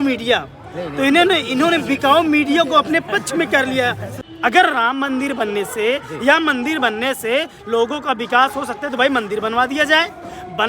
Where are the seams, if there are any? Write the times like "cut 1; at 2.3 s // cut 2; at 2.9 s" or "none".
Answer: cut 1; at 4.1 s